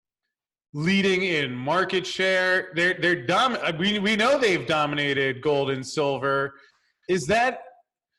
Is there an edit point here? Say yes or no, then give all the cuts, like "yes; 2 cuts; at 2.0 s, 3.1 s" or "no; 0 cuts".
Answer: no; 0 cuts